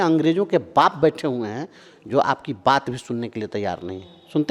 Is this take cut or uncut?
uncut